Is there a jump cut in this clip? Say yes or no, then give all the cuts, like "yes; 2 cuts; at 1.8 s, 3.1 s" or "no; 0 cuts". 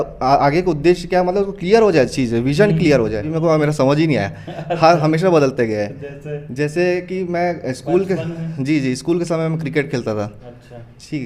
yes; 1 cut; at 3.3 s